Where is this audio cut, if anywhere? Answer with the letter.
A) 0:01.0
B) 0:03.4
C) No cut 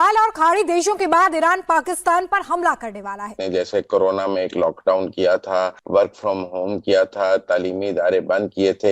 B